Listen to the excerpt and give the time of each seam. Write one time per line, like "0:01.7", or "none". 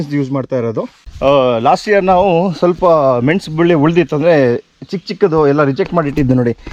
0:01.0